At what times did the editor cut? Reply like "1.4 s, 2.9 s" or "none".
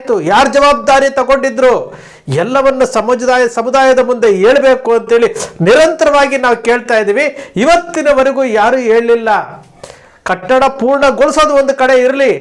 none